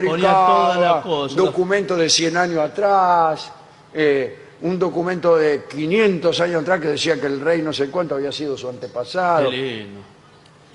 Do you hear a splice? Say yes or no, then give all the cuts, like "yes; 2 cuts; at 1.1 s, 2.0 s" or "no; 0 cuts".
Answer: yes; 1 cut; at 6.2 s